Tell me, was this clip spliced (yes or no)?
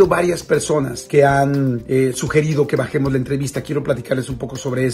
no